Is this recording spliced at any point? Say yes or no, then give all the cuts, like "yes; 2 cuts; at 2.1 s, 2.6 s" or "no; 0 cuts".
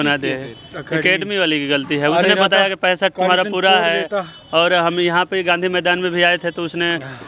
no; 0 cuts